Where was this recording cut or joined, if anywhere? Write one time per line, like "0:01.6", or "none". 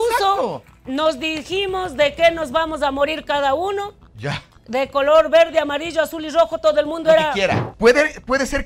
0:07.7